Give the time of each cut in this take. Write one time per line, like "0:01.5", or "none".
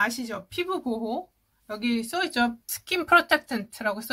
0:02.7